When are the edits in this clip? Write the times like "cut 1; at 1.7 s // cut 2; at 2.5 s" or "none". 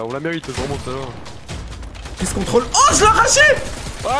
none